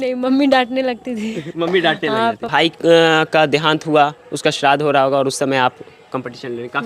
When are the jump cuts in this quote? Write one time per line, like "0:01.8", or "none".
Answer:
0:02.4